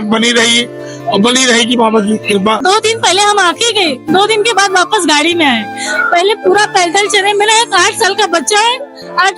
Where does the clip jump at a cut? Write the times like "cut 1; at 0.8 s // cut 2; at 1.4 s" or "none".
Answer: cut 1; at 2.6 s